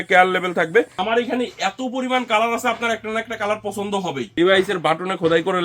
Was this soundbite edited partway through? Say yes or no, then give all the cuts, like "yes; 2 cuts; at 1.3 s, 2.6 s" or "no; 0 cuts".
yes; 2 cuts; at 0.9 s, 4.2 s